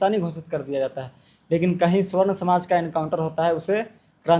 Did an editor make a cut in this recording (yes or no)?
no